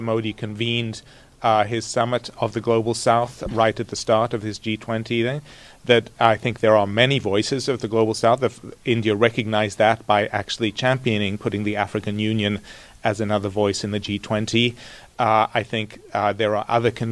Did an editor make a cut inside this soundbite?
no; 0 cuts

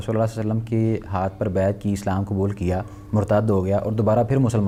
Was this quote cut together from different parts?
no; 0 cuts

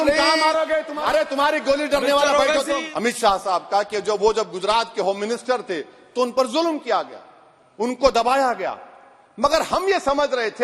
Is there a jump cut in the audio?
yes; 2 cuts; at 0.9 s, 2.9 s

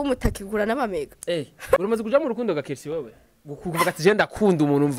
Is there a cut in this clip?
yes; 1 cut; at 1.8 s

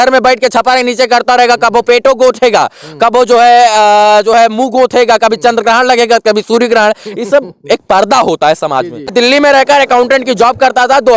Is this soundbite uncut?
no; 1 cut; at 9.1 s

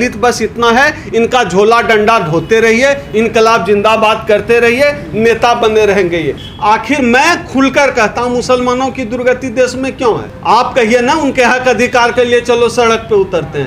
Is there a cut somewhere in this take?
yes; 1 cut; at 6.4 s

